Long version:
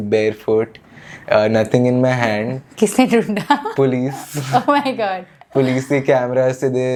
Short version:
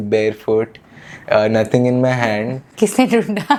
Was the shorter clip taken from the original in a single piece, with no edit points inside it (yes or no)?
yes